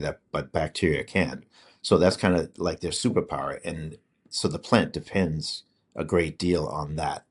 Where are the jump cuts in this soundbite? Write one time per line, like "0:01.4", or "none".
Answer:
none